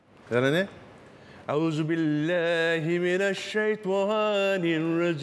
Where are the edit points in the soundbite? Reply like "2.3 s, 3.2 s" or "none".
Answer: none